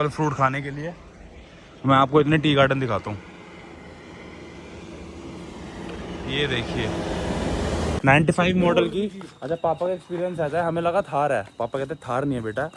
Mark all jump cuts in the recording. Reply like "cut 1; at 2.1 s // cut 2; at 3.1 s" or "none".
cut 1; at 8.0 s